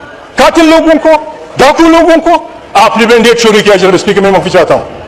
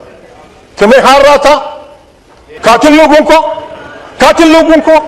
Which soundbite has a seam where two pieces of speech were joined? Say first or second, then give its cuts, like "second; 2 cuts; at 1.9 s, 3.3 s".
second; 1 cut; at 2.5 s